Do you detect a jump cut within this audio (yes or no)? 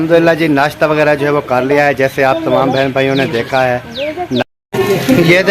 yes